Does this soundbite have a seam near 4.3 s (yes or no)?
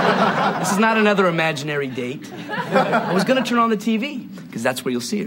no